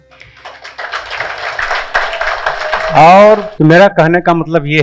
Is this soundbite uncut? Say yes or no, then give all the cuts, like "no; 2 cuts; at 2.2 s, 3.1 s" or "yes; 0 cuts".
no; 1 cut; at 3.5 s